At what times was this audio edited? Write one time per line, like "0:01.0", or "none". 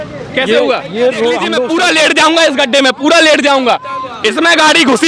0:01.6

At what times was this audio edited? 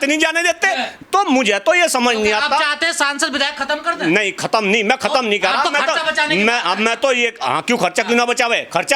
0:00.9

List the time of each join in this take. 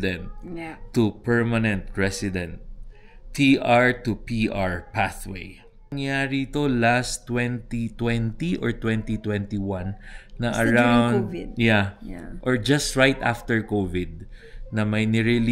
0:06.0

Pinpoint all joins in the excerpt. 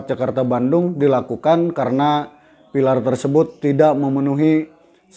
none

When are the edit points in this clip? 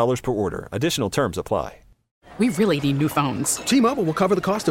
0:02.2

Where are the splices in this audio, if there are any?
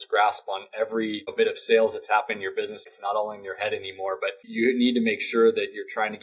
0:01.3
0:02.9
0:04.5

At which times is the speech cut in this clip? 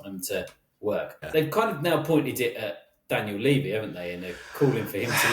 0:01.3

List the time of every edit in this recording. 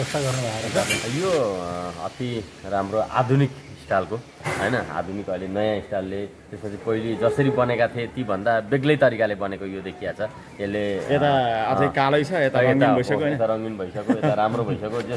0:01.0

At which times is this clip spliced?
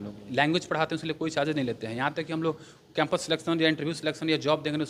none

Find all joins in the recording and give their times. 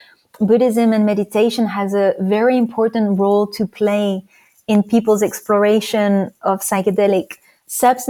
none

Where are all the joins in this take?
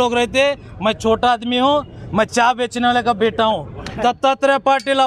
0:04.2

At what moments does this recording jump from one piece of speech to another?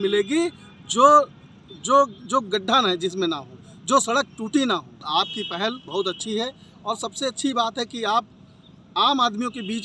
0:05.1

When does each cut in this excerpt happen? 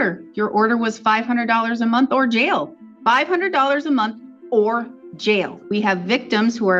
0:02.8
0:05.6

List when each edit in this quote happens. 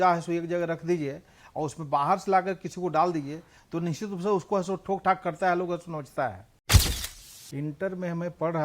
0:07.0

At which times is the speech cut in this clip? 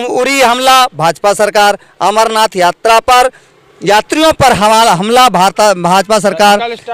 none

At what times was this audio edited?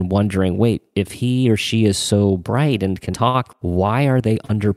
0:03.6

